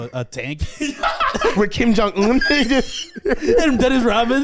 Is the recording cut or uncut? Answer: cut